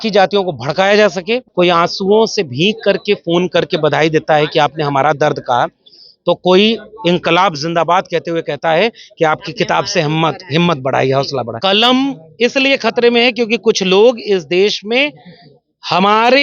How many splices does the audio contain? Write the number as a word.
two